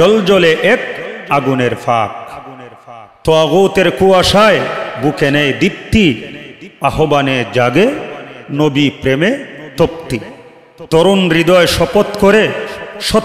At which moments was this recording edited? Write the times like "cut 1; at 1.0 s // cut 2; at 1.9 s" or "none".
cut 1; at 4.9 s